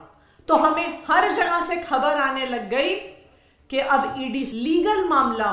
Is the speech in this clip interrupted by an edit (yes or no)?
yes